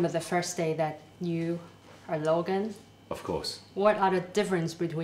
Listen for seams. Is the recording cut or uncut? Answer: cut